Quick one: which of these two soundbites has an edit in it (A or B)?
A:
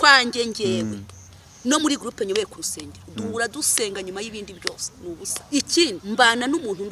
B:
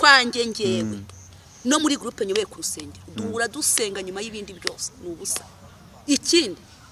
A